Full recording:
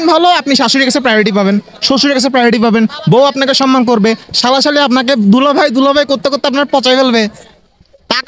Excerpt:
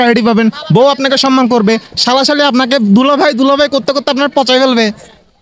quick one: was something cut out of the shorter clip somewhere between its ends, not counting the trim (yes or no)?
no